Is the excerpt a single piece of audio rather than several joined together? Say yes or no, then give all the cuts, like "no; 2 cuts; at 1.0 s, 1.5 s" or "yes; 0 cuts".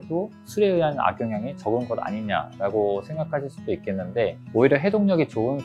no; 1 cut; at 4.4 s